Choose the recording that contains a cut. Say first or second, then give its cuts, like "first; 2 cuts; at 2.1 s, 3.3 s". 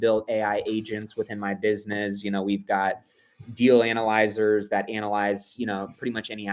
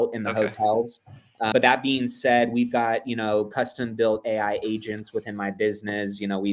second; 1 cut; at 1.5 s